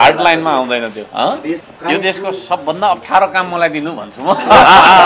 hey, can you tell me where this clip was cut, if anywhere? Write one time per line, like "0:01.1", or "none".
0:01.7